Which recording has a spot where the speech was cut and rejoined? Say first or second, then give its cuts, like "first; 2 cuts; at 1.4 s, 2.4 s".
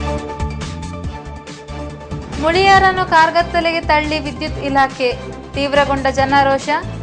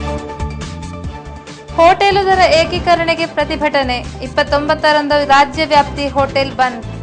first; 1 cut; at 1.2 s